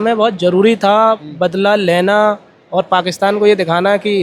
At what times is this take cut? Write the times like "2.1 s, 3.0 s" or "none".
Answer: none